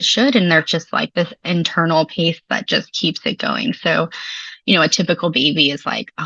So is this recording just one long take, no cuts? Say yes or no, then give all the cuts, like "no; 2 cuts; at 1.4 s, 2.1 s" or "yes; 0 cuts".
yes; 0 cuts